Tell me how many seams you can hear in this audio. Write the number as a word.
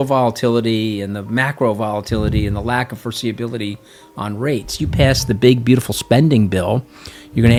zero